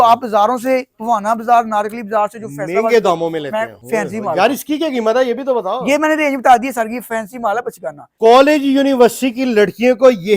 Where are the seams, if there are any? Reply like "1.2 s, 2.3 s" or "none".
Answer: 3.8 s, 8.1 s